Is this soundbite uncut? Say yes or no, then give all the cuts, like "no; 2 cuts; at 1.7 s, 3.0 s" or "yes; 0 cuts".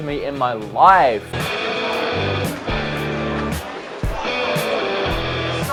yes; 0 cuts